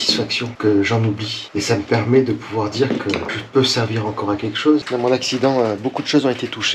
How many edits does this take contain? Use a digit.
1